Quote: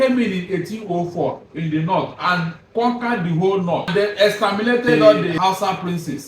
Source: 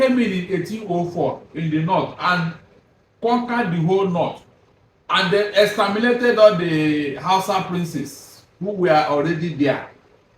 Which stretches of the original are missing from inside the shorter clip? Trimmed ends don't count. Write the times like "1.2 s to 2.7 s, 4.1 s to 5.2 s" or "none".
2.6 s to 3.0 s, 4.3 s to 5.2 s, 6.7 s to 7.2 s